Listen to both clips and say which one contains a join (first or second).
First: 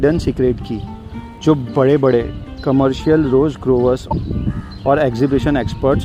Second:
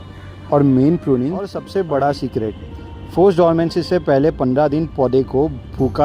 second